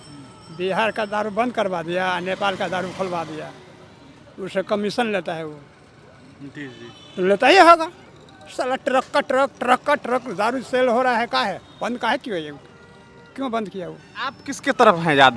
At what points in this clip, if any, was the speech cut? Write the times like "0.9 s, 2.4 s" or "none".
14.5 s